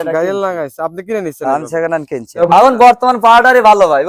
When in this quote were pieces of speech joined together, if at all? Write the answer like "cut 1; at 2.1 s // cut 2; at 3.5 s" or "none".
cut 1; at 2.2 s